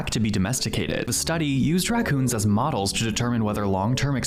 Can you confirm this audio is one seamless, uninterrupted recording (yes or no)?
yes